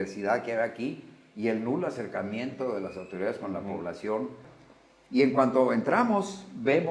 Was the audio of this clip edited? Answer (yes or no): yes